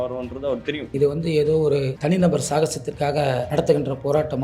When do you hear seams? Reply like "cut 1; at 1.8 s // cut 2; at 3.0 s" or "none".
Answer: cut 1; at 1.9 s // cut 2; at 3.5 s